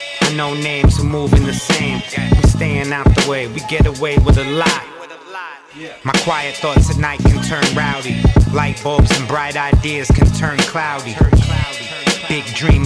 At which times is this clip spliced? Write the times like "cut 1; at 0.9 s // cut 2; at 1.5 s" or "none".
cut 1; at 11.7 s